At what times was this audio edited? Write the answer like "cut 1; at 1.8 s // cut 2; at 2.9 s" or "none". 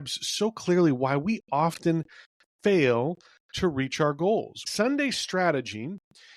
cut 1; at 4.7 s